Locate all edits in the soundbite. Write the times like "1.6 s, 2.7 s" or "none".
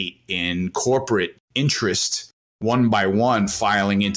1.4 s, 2.6 s